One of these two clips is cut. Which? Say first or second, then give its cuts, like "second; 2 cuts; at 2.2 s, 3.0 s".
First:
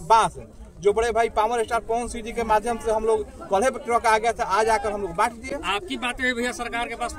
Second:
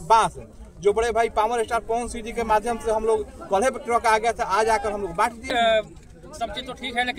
second; 1 cut; at 5.5 s